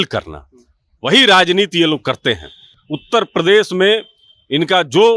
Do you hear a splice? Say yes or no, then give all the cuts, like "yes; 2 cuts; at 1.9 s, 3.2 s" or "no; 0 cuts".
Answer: no; 0 cuts